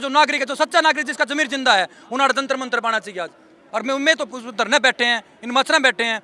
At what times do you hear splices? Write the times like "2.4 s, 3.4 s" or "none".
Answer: 3.6 s